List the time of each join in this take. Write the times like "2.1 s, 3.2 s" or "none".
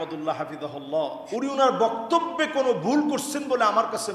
1.2 s